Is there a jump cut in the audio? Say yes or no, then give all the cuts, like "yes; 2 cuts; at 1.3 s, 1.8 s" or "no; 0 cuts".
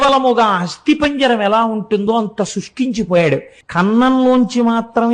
yes; 1 cut; at 3.6 s